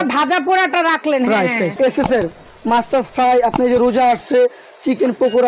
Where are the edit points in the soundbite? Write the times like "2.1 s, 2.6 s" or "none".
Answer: 1.7 s